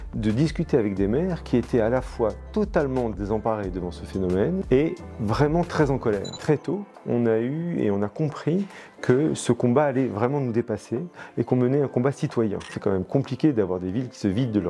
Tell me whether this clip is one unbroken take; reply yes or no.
no